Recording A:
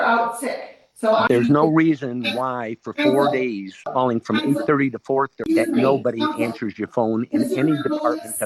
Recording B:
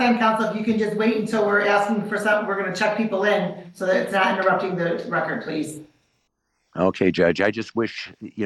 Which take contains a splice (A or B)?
A